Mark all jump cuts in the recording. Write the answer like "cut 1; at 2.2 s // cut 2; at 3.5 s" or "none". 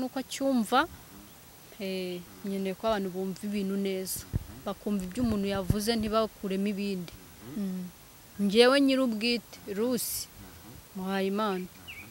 cut 1; at 8.2 s